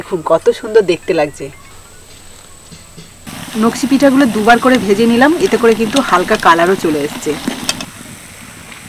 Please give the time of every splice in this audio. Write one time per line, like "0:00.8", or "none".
0:03.2
0:07.9